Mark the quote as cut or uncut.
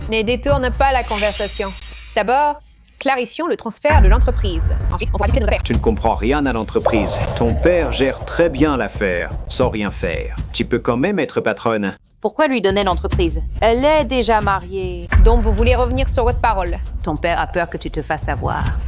uncut